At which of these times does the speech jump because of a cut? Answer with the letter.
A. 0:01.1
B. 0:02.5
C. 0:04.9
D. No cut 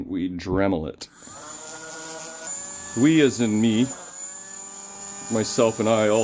B